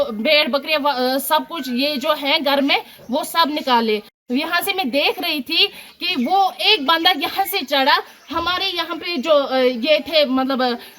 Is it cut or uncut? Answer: cut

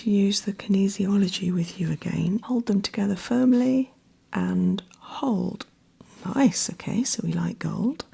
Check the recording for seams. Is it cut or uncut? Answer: cut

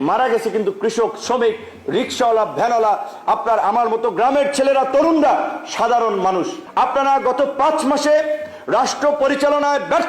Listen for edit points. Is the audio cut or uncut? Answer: cut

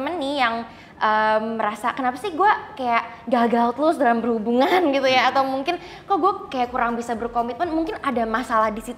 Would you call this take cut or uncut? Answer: uncut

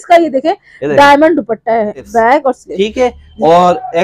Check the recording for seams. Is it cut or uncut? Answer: cut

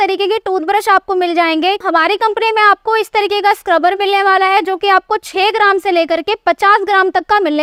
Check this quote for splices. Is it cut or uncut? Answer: uncut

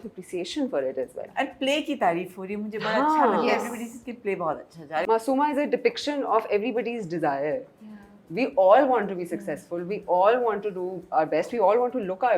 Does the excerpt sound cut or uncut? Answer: cut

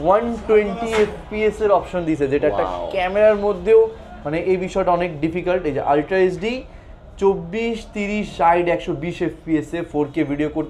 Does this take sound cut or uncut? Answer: uncut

